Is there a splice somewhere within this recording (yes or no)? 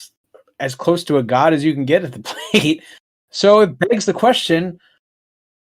no